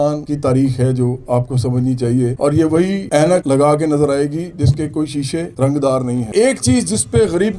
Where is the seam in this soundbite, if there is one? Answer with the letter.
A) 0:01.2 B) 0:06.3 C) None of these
B